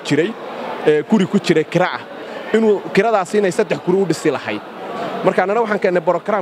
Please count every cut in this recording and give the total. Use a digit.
0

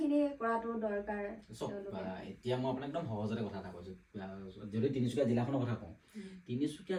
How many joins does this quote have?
0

